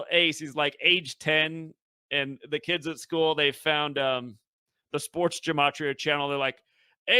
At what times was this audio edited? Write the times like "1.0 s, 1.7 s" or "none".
none